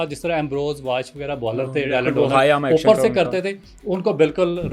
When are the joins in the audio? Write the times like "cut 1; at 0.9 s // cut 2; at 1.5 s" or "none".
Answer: none